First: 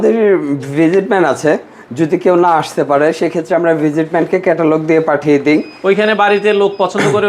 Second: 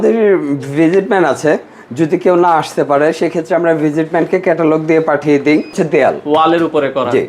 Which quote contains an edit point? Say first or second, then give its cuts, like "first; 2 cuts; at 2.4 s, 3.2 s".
second; 1 cut; at 5.8 s